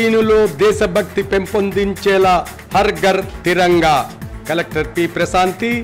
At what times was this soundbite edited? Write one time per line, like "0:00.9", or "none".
none

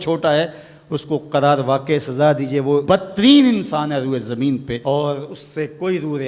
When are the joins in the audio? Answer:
0:02.8
0:04.7

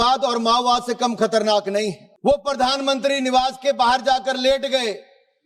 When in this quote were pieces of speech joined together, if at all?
0:02.1

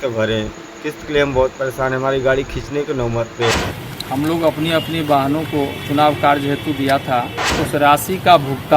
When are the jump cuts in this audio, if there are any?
0:03.5
0:07.5

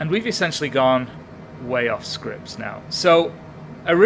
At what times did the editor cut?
none

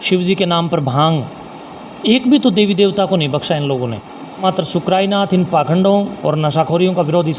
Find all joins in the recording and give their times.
0:04.4

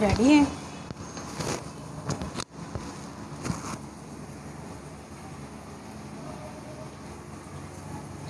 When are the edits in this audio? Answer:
0:07.1

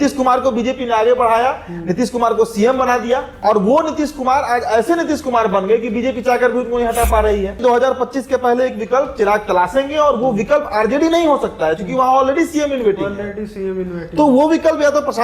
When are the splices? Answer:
0:03.3
0:07.6

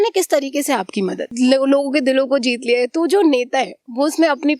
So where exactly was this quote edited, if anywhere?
0:01.3

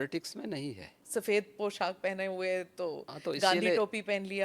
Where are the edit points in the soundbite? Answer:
0:01.0

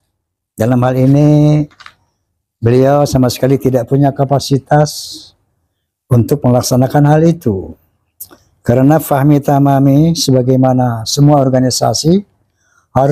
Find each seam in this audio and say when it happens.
none

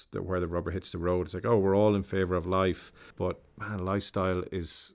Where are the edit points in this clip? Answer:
0:03.1

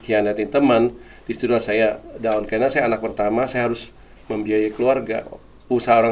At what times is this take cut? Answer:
none

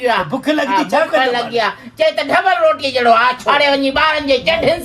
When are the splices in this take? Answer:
0:03.4

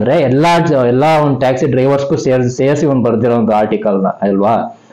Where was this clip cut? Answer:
none

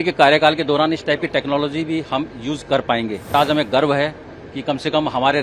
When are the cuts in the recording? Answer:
0:03.3

